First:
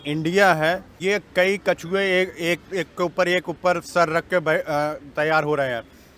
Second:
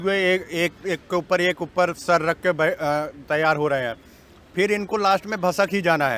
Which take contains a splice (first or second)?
first